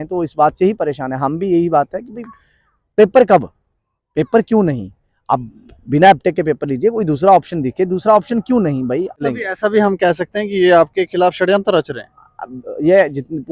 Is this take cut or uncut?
cut